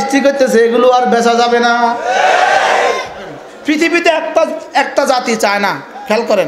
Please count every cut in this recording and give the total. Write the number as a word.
one